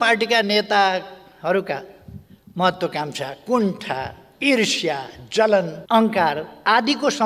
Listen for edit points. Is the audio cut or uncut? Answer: cut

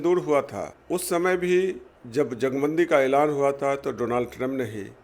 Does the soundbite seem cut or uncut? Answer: uncut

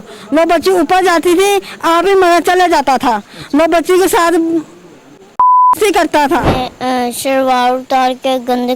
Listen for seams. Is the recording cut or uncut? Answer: cut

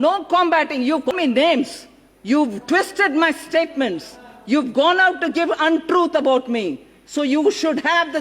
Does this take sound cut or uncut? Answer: cut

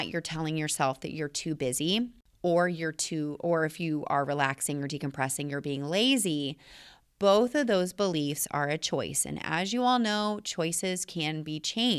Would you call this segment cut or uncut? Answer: cut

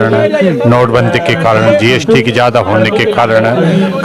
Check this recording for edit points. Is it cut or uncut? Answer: uncut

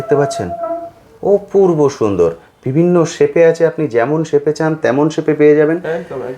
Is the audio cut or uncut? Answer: uncut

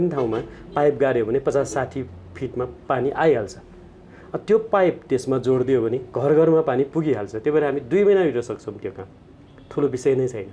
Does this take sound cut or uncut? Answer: uncut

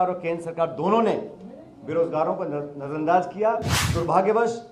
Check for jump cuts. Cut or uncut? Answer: cut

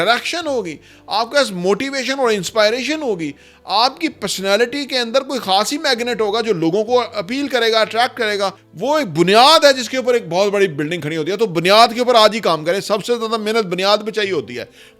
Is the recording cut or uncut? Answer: cut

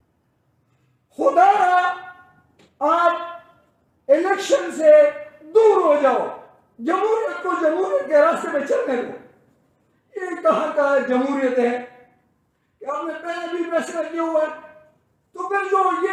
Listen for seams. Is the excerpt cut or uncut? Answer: uncut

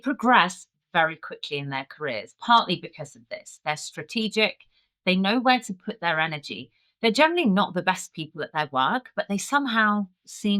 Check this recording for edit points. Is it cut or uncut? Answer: uncut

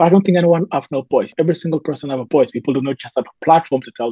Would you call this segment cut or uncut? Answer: cut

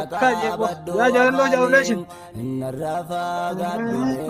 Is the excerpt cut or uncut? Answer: uncut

